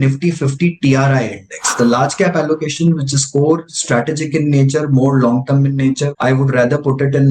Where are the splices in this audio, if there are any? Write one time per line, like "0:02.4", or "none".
0:01.7
0:06.1